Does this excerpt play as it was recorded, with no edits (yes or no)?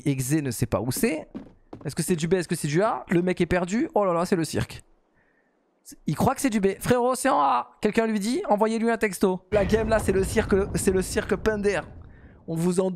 no